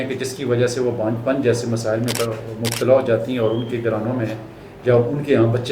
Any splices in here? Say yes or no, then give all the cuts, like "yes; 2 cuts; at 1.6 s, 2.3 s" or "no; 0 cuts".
no; 0 cuts